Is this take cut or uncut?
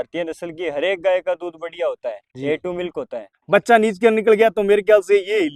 cut